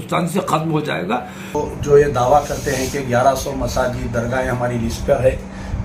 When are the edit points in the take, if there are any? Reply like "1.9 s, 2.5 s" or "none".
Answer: 1.6 s